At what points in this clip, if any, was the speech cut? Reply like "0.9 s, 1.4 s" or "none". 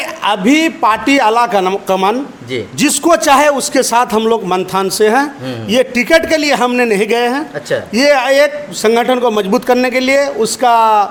none